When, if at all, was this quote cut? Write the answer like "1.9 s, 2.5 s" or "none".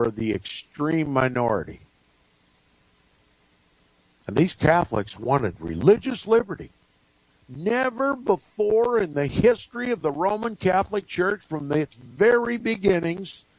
5.1 s